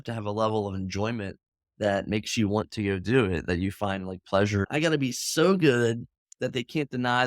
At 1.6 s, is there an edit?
no; 1 cut; at 4.7 s

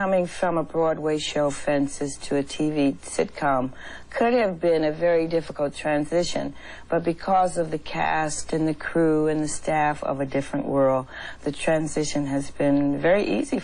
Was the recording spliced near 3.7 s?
no; 0 cuts

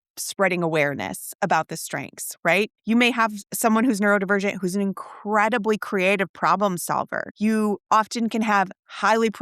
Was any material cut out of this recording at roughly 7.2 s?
yes; 2 cuts; at 2.8 s, 7.2 s

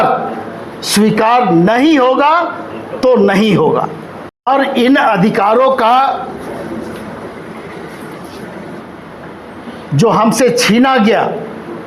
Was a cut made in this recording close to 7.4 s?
no; 1 cut; at 4.2 s

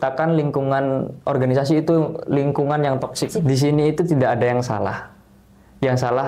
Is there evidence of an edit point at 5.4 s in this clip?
no; 1 cut; at 3.4 s

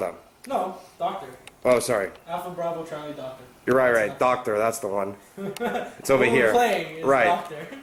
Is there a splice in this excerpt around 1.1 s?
no; 0 cuts

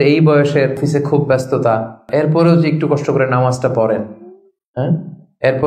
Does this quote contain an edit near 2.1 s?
yes; 2 cuts; at 0.8 s, 2.1 s

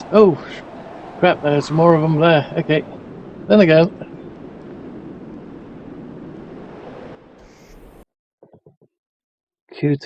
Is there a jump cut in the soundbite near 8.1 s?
yes; 1 cut; at 8.1 s

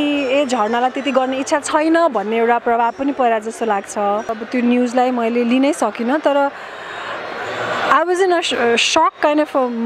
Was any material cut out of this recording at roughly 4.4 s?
yes; 1 cut; at 4.4 s

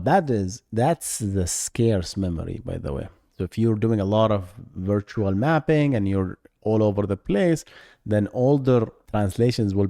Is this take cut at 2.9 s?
no; 1 cut; at 9.0 s

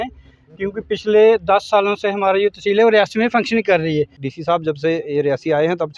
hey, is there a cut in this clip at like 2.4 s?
no; 1 cut; at 4.3 s

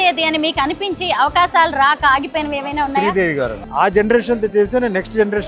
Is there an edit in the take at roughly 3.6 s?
yes; 1 cut; at 3.6 s

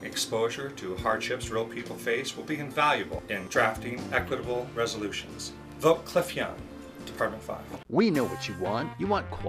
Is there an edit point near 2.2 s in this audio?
no; 1 cut; at 7.7 s

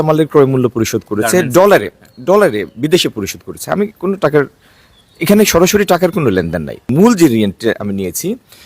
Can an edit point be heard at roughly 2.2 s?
no; 1 cut; at 6.9 s

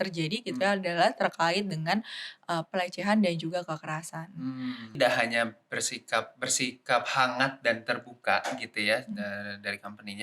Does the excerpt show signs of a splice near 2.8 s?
no; 1 cut; at 4.9 s

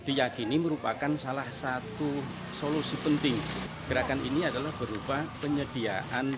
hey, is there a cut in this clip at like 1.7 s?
no; 1 cut; at 3.7 s

